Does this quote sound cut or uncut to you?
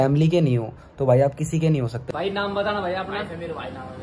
cut